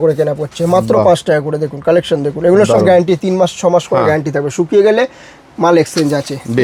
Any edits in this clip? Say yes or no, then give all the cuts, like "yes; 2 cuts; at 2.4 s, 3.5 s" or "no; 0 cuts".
no; 0 cuts